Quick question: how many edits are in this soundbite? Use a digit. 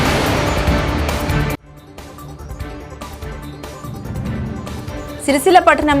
1